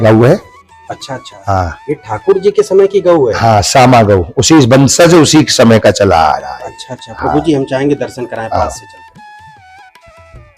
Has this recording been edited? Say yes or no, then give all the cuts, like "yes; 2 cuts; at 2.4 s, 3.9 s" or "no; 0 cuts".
no; 0 cuts